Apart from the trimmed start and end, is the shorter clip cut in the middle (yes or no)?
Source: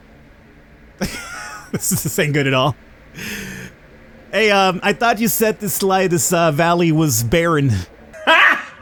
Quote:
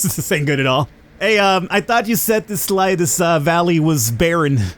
yes